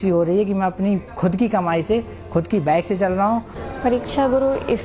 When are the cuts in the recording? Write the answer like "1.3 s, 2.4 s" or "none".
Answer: 3.5 s